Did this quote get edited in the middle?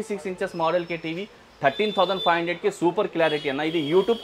no; 0 cuts

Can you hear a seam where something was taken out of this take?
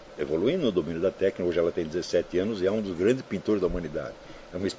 no; 0 cuts

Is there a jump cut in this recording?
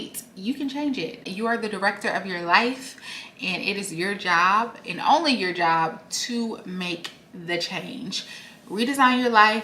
yes; 1 cut; at 1.3 s

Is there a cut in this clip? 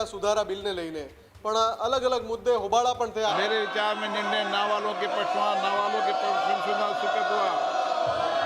yes; 1 cut; at 3.3 s

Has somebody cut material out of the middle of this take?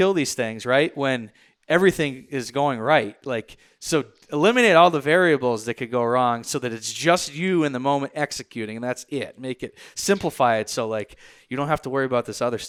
no; 0 cuts

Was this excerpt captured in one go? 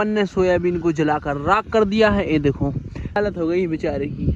no; 1 cut; at 3.2 s

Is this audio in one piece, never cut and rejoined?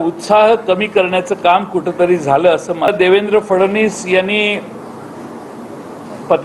no; 1 cut; at 2.9 s

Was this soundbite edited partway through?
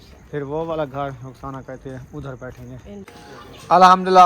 yes; 1 cut; at 3.1 s

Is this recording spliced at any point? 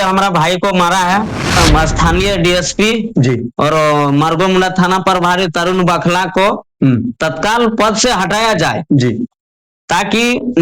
yes; 1 cut; at 1.6 s

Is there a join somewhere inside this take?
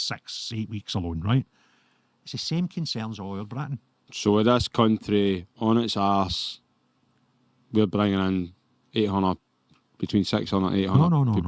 yes; 1 cut; at 4.1 s

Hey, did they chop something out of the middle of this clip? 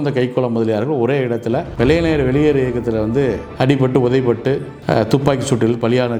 no; 0 cuts

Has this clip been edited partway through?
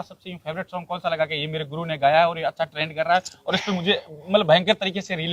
no; 0 cuts

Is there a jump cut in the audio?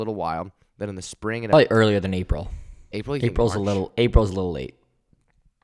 yes; 1 cut; at 1.5 s

